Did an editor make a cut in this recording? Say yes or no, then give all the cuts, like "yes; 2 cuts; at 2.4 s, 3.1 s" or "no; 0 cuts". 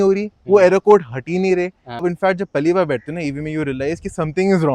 yes; 1 cut; at 2.0 s